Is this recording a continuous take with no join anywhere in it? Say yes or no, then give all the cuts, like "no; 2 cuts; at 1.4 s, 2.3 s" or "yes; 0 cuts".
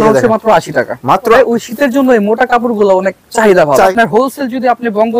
no; 2 cuts; at 1.4 s, 3.9 s